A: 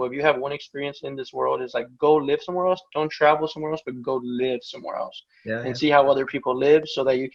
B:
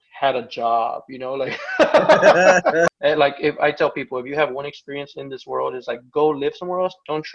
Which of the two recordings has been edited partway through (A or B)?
B